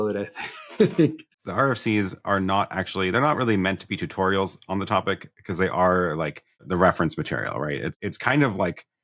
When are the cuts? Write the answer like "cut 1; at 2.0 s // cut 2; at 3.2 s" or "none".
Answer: cut 1; at 1.3 s // cut 2; at 6.6 s // cut 3; at 7.9 s